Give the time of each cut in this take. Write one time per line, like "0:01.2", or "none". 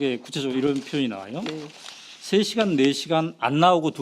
0:02.6